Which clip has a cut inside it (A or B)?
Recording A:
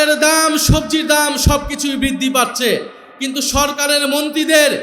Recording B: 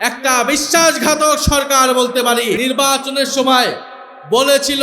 B